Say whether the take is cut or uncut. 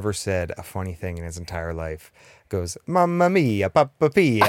uncut